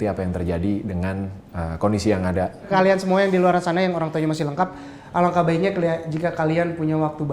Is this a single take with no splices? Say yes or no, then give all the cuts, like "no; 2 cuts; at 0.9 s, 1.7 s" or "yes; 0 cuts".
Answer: no; 1 cut; at 2.7 s